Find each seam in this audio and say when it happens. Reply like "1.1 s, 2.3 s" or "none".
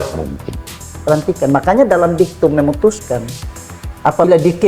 0.9 s